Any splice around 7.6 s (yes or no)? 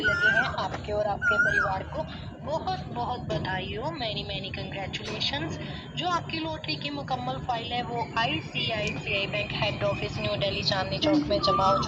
no